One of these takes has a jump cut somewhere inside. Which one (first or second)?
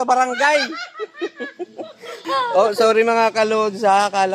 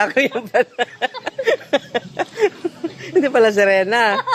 first